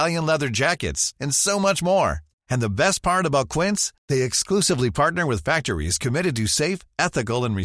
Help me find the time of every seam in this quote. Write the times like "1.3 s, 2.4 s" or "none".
none